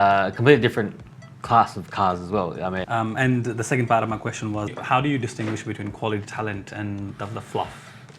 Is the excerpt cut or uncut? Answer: cut